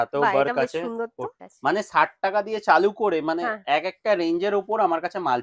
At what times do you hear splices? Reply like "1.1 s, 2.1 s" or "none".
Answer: 1.4 s